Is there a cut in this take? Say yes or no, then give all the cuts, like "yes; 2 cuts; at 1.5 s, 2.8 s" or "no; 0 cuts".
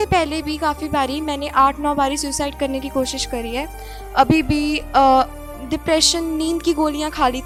no; 0 cuts